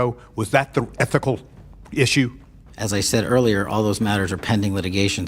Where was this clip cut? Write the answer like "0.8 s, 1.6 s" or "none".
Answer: none